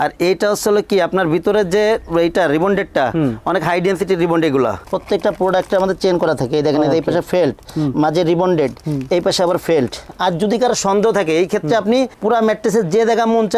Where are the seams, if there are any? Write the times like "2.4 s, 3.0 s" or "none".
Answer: 4.9 s, 10.0 s